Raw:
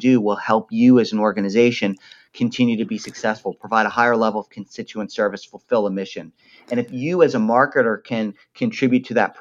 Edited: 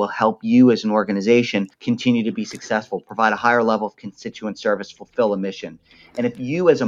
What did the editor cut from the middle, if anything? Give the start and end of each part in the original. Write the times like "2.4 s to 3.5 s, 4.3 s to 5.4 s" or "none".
2.0 s to 2.3 s